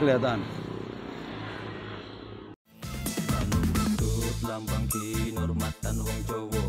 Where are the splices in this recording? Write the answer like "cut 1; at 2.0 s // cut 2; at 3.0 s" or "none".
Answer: cut 1; at 2.5 s